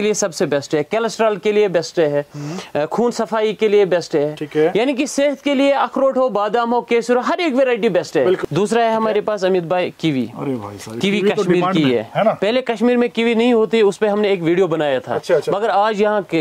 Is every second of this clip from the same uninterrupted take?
no; 1 cut; at 8.4 s

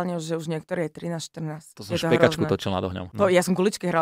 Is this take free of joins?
no; 2 cuts; at 1.7 s, 3.0 s

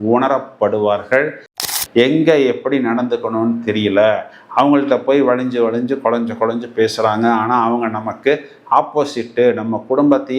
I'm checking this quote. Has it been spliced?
yes; 1 cut; at 1.5 s

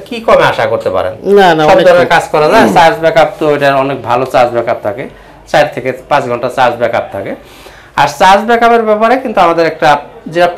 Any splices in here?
no; 0 cuts

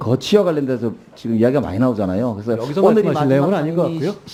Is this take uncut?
yes; 0 cuts

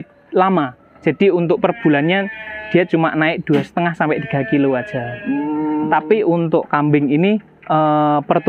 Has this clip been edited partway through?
no; 0 cuts

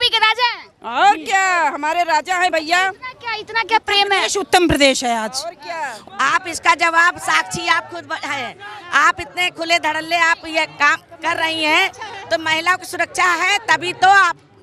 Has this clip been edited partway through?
yes; 1 cut; at 5.9 s

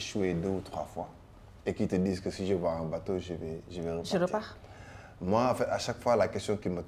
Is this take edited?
no; 0 cuts

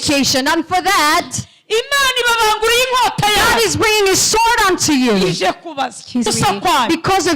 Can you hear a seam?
yes; 1 cut; at 6.3 s

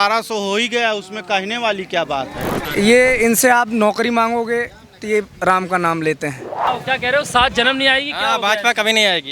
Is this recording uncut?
no; 2 cuts; at 2.6 s, 6.9 s

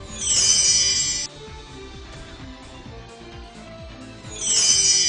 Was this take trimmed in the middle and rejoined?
no; 0 cuts

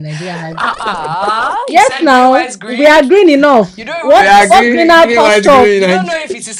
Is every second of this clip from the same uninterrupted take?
yes; 0 cuts

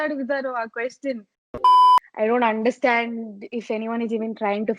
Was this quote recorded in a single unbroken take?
no; 2 cuts; at 1.4 s, 2.1 s

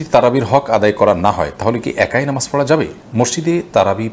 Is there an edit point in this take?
no; 0 cuts

